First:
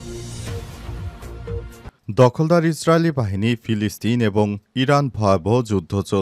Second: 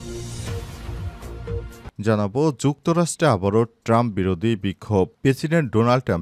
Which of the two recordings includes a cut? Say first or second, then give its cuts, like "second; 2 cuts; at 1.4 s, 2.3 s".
second; 1 cut; at 1.9 s